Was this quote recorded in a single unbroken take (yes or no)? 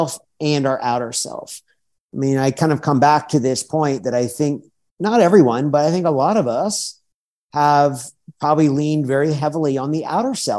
yes